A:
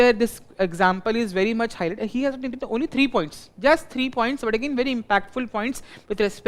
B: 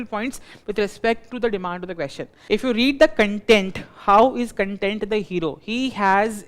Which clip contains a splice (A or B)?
B